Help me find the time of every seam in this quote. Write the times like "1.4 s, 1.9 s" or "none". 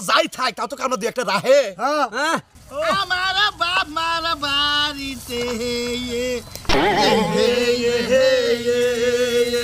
2.5 s